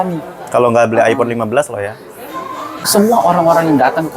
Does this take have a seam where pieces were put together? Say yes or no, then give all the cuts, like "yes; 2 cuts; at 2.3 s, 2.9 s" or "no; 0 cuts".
yes; 1 cut; at 2.8 s